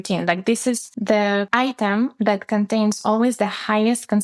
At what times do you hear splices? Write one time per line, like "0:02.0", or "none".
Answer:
0:01.4